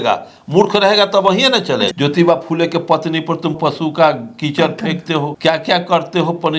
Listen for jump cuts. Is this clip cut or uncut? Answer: cut